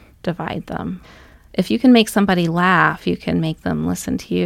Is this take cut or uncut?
cut